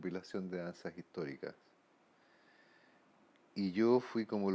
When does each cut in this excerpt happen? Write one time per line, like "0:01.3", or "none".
0:03.4